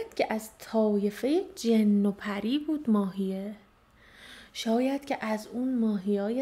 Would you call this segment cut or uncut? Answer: uncut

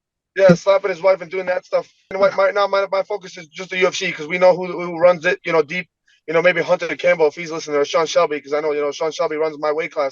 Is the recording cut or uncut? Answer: cut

